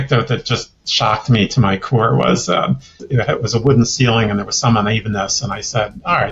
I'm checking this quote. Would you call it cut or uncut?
cut